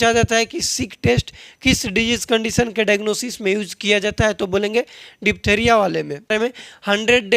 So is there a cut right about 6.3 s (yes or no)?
yes